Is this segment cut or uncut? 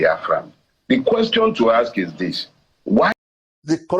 cut